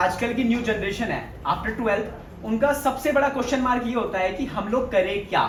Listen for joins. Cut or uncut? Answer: uncut